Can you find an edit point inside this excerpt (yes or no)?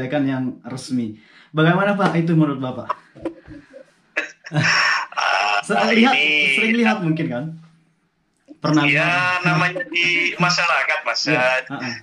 no